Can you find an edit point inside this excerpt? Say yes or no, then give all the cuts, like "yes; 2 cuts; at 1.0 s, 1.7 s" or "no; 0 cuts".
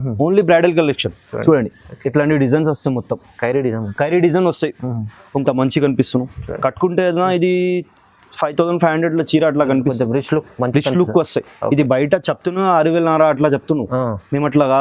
yes; 1 cut; at 5.2 s